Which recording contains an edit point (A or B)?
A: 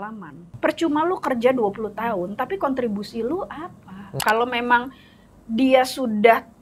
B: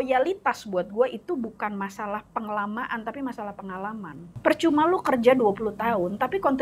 A